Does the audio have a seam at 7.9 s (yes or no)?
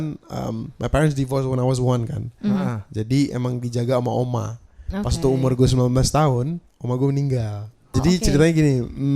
yes